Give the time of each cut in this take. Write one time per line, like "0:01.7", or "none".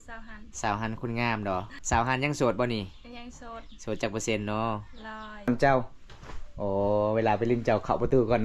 0:01.8
0:05.5